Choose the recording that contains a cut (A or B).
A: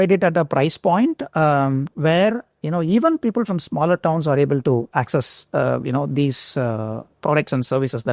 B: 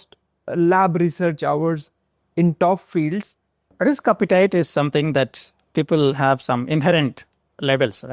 B